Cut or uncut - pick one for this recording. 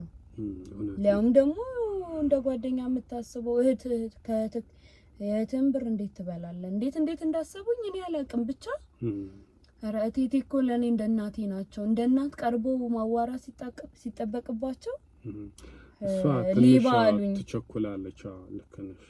uncut